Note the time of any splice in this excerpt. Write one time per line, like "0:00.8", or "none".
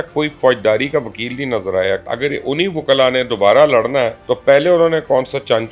0:02.0
0:04.2